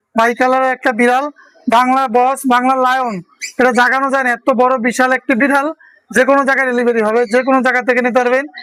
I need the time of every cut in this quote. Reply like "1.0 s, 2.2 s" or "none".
none